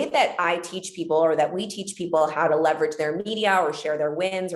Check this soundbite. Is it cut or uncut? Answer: uncut